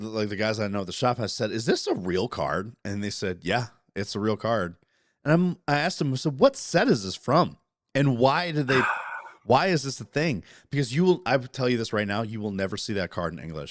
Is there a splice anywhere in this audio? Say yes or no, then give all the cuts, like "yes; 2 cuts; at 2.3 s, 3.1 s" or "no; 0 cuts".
no; 0 cuts